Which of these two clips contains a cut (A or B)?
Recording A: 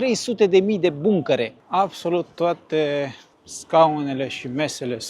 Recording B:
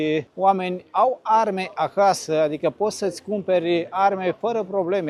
A